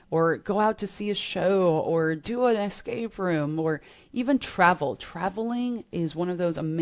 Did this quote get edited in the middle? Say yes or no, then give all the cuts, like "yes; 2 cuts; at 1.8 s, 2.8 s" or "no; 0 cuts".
no; 0 cuts